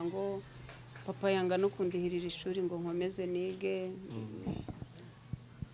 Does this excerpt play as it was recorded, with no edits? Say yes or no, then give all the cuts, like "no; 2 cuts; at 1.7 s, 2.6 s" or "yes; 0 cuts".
yes; 0 cuts